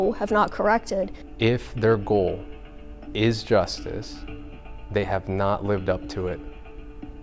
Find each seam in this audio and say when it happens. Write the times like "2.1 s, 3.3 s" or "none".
1.2 s